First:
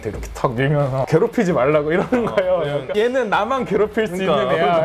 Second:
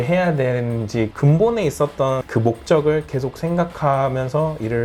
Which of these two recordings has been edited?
first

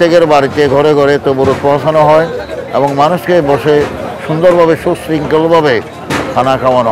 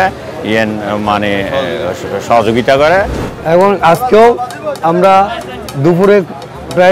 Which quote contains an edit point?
second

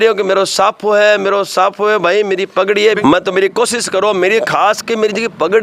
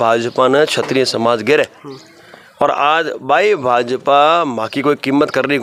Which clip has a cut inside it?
first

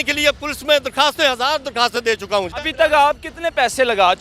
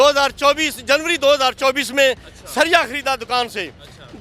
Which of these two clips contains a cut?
first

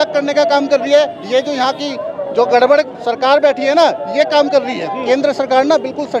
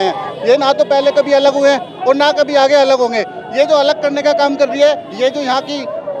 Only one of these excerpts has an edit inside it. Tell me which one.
first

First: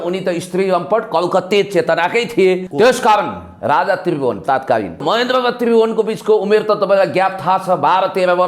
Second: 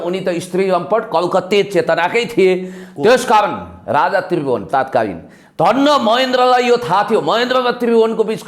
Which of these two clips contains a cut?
first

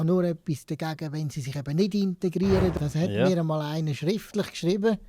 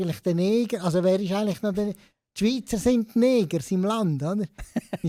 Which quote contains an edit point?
first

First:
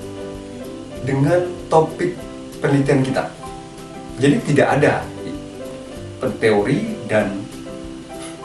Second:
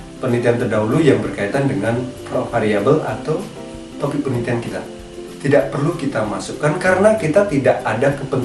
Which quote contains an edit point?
first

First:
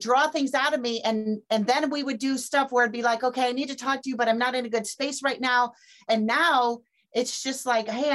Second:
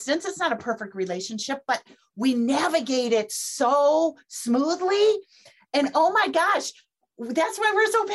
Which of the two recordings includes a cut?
first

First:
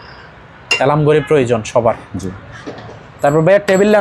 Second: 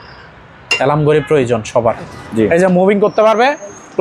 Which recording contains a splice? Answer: second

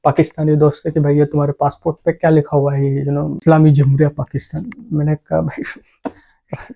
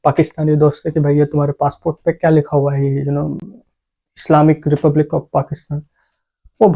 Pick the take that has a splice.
first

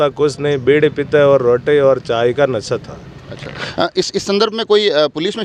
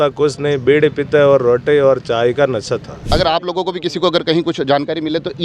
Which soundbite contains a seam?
second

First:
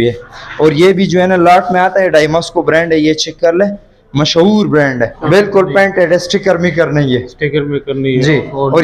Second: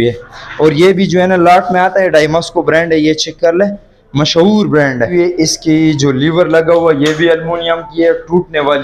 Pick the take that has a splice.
second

